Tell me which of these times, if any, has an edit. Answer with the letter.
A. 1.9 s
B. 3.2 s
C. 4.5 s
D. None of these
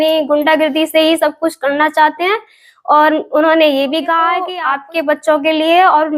C